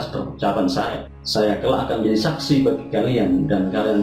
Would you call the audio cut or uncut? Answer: cut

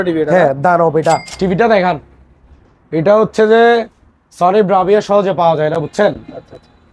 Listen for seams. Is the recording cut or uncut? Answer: cut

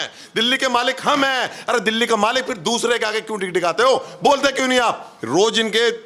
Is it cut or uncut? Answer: cut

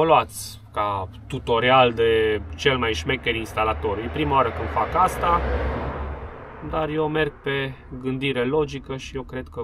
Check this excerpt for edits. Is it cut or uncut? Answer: uncut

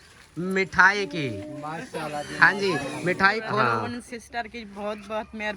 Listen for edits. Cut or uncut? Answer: cut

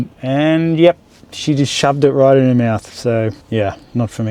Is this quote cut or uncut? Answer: cut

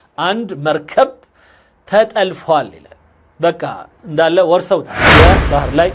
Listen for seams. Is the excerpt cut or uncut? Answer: cut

